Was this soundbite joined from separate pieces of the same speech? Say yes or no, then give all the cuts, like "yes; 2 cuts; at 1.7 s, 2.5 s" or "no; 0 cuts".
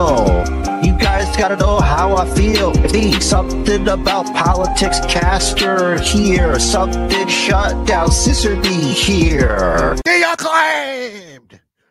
yes; 1 cut; at 10.0 s